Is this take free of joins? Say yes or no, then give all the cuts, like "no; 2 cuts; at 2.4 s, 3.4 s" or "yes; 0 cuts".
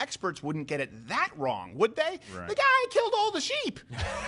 yes; 0 cuts